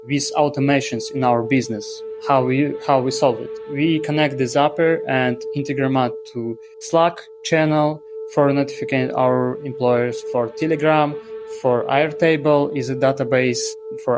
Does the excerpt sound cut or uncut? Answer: uncut